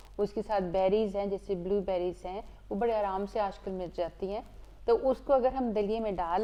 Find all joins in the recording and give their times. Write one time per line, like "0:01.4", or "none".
none